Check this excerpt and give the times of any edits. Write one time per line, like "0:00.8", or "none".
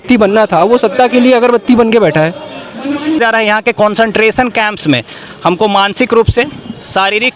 0:03.2